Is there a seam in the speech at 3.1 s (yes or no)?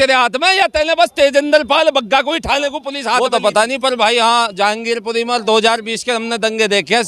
yes